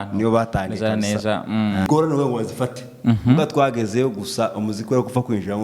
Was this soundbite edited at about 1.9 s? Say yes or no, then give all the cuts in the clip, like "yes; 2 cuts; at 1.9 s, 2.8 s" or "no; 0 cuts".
yes; 1 cut; at 1.9 s